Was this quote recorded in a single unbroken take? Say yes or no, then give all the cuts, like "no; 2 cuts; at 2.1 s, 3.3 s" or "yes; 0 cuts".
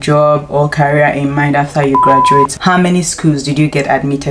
no; 1 cut; at 2.5 s